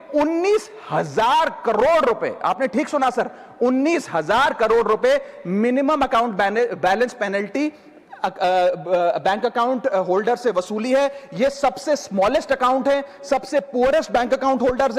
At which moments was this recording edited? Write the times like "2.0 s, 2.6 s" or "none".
none